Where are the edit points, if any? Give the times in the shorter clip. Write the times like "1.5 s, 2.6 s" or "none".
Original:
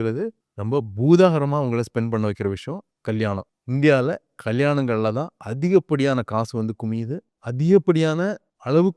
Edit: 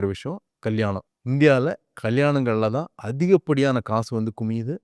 none